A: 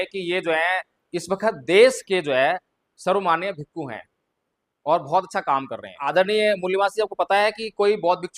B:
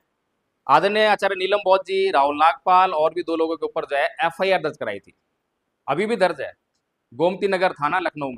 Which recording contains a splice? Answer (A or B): A